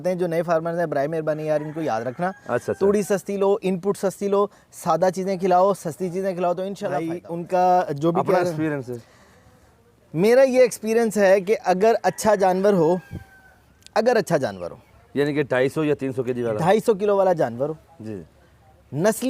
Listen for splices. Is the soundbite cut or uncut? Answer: cut